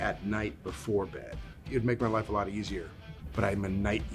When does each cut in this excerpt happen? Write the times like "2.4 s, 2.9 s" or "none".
1.7 s, 3.1 s